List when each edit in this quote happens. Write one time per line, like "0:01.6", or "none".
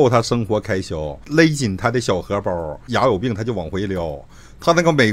0:01.2
0:02.8